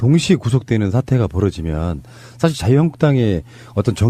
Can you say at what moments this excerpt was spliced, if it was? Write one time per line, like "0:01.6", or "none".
none